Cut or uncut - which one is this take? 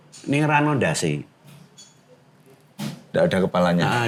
uncut